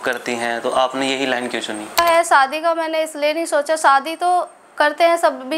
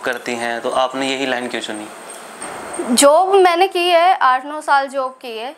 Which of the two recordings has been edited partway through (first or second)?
first